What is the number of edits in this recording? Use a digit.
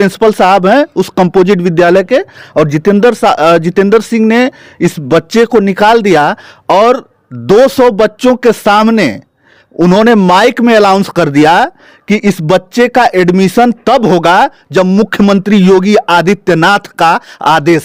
0